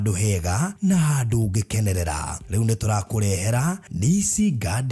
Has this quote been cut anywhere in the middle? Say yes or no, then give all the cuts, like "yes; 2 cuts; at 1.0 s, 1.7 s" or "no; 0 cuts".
yes; 1 cut; at 3.3 s